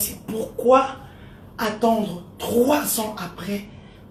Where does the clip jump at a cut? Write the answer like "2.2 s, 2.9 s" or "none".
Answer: none